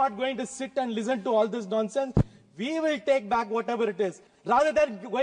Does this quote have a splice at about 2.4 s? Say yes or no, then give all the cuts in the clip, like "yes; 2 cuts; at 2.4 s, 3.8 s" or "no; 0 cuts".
no; 1 cut; at 4.3 s